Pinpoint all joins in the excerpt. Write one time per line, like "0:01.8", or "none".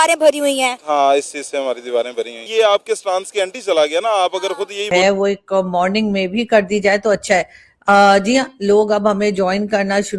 0:04.9